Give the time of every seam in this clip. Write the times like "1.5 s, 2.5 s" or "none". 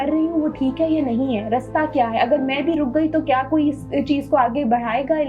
none